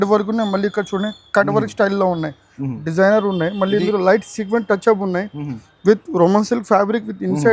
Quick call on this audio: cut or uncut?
uncut